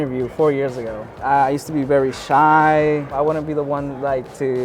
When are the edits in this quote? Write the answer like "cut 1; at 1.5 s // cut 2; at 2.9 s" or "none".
cut 1; at 1.1 s // cut 2; at 3.2 s